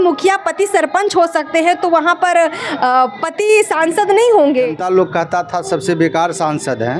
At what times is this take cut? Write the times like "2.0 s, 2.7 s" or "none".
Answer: 4.8 s